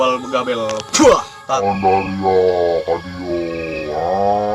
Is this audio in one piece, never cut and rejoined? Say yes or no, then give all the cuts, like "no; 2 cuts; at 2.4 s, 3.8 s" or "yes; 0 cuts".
no; 1 cut; at 1.6 s